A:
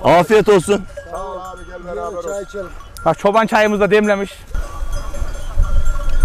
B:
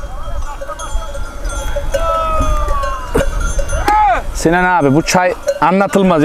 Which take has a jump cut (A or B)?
A